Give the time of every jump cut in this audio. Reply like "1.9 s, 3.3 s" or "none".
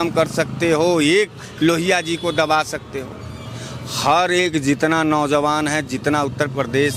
none